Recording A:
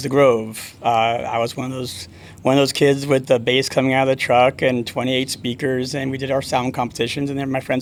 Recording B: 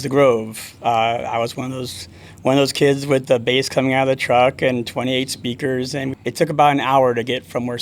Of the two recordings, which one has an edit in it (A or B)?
B